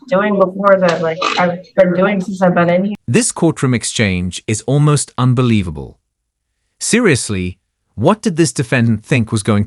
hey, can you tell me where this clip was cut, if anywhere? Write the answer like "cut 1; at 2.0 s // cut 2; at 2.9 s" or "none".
none